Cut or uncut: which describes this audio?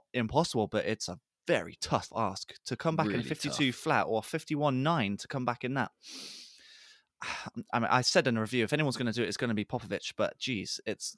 uncut